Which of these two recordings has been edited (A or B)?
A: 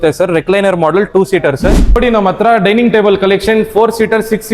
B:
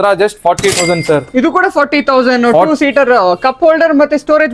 A